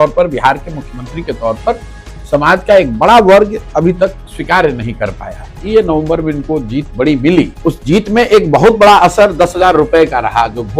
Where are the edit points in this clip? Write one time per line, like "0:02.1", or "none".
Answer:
0:05.6
0:07.5